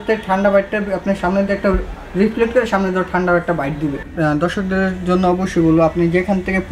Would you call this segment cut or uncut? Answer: cut